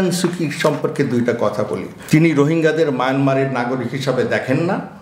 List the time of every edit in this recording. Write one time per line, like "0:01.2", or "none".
0:01.9